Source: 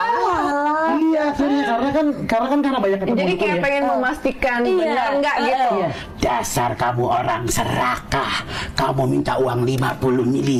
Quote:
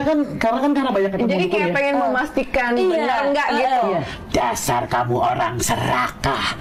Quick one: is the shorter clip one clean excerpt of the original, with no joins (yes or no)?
yes